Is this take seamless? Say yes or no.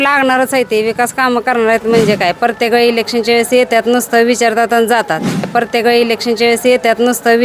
yes